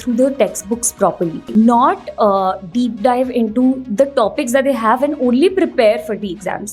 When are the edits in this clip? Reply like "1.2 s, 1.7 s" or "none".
1.4 s

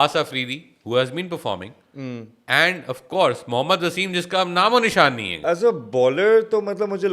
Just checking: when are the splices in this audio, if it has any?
5.4 s

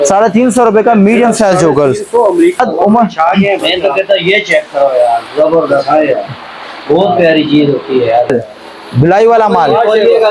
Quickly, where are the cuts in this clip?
2.6 s, 8.3 s

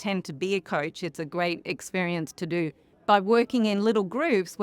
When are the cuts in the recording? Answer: 2.9 s

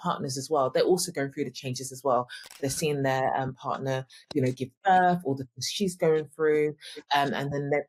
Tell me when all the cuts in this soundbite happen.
none

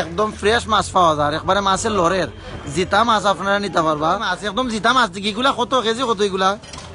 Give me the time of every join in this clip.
4.4 s

